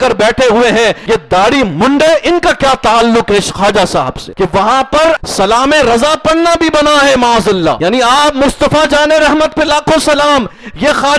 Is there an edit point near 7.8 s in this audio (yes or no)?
yes